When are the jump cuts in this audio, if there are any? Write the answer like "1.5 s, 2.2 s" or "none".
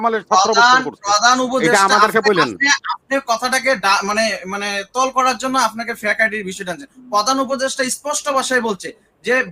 none